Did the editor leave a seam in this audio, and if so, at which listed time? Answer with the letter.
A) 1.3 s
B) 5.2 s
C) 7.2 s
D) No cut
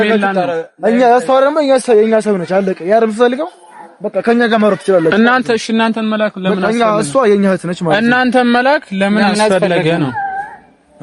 D